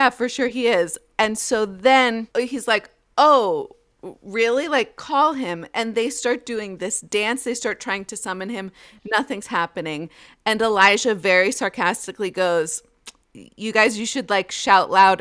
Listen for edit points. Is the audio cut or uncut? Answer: cut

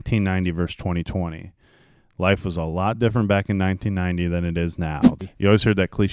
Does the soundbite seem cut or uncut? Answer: cut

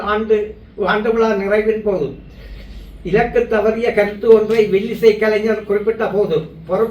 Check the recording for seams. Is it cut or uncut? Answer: uncut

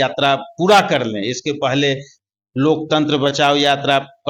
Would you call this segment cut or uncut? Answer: uncut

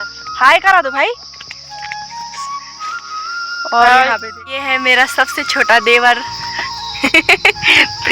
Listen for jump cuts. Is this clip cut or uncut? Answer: cut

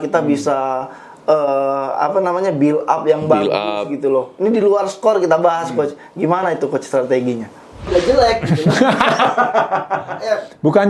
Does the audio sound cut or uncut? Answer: cut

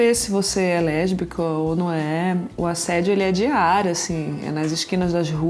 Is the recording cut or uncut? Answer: uncut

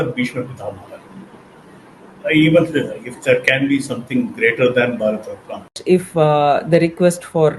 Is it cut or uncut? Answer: cut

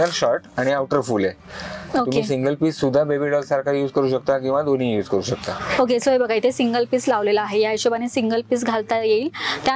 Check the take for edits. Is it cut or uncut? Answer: uncut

